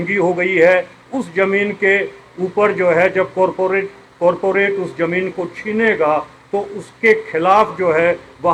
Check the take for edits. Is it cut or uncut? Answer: uncut